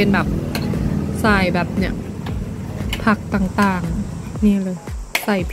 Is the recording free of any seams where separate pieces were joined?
no; 1 cut; at 4.3 s

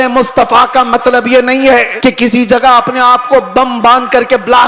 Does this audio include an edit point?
yes; 1 cut; at 1.9 s

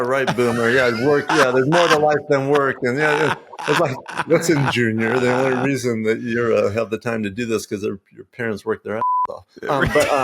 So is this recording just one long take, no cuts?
no; 1 cut; at 4.2 s

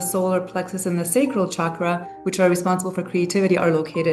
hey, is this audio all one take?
yes; 0 cuts

